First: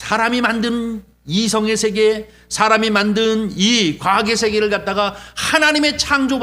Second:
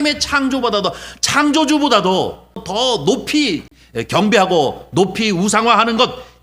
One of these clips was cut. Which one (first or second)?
second